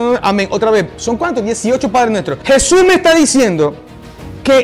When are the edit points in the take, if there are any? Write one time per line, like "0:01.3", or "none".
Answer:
0:02.3